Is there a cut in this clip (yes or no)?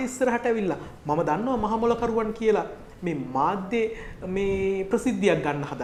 no